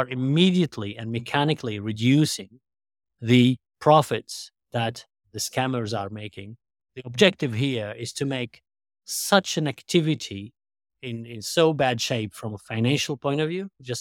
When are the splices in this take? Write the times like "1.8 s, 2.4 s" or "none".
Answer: 5.2 s, 6.9 s